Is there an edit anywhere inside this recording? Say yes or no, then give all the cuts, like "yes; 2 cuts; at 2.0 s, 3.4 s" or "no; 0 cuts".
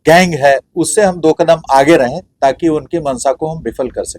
no; 0 cuts